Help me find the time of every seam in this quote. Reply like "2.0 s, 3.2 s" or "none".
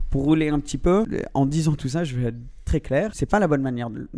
1.1 s, 3.2 s